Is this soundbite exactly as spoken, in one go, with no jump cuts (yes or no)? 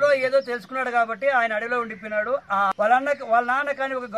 no